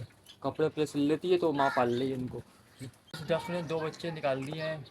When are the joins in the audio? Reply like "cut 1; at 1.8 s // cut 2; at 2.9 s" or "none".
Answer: cut 1; at 3.2 s